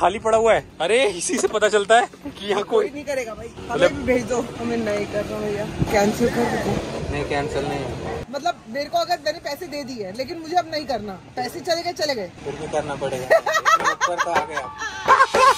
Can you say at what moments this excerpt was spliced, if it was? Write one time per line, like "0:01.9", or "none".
0:03.6
0:04.5
0:08.2